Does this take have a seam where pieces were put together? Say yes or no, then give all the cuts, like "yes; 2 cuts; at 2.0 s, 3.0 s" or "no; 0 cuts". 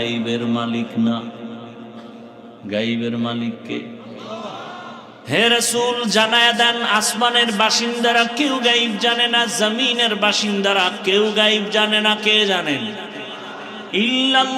yes; 1 cut; at 5.2 s